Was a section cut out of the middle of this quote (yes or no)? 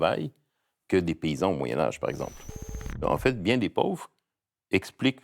yes